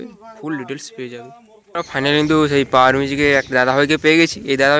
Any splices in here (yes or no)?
yes